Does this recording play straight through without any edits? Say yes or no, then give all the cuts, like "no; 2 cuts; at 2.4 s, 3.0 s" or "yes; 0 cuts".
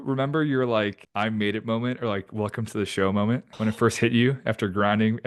no; 2 cuts; at 1.0 s, 3.5 s